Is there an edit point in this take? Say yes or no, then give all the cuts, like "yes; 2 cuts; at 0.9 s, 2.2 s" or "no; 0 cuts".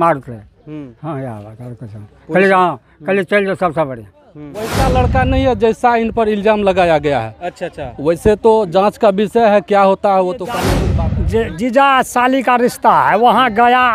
yes; 2 cuts; at 4.7 s, 10.7 s